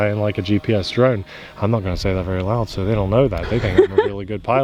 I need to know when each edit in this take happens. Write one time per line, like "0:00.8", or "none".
none